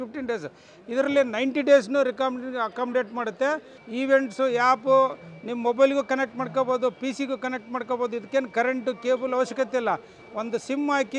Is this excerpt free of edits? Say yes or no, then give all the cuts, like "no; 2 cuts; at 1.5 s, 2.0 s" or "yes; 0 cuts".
no; 1 cut; at 3.7 s